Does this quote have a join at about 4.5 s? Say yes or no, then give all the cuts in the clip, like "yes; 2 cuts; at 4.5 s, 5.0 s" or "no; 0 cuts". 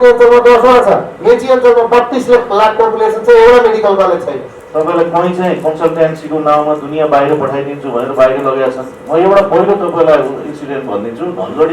yes; 1 cut; at 4.5 s